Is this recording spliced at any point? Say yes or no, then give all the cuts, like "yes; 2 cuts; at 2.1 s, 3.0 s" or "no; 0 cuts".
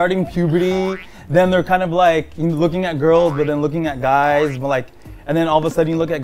no; 0 cuts